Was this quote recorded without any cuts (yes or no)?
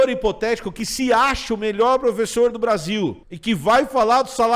no